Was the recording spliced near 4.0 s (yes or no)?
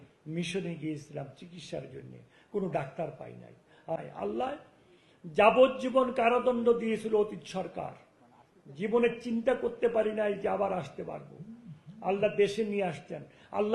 yes